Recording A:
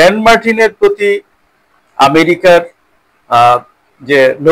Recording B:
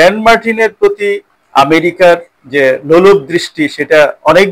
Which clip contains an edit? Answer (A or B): B